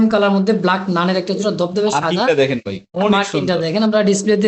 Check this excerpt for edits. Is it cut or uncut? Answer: uncut